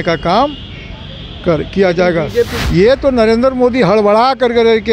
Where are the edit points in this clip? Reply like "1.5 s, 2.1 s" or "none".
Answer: 2.6 s